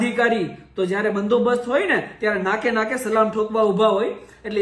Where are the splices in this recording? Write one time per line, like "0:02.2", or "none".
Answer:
none